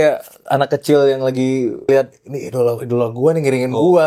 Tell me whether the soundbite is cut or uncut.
cut